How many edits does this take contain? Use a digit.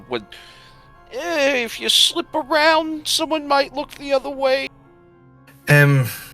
1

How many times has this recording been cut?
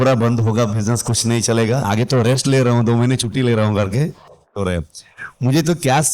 2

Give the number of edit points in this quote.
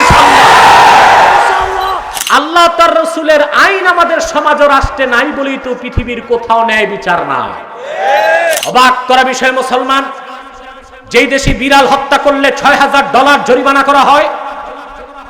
2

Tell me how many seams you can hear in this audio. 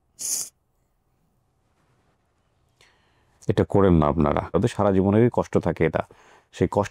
1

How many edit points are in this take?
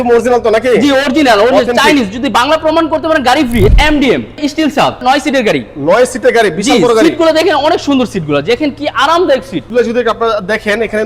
3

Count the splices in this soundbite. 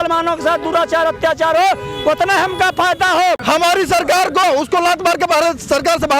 1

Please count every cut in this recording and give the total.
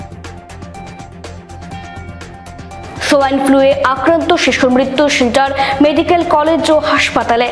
0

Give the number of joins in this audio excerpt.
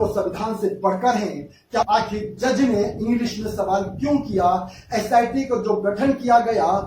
1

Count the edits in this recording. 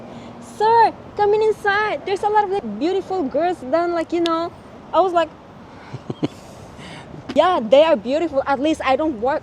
2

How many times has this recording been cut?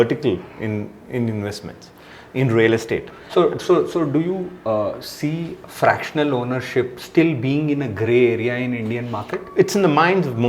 0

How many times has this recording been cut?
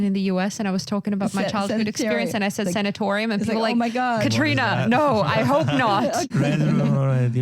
1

